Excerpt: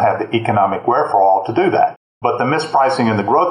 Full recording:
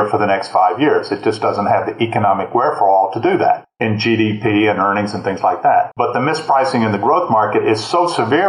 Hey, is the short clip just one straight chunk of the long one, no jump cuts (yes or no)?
no